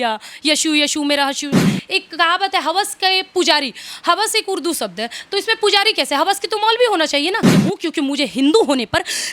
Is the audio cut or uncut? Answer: cut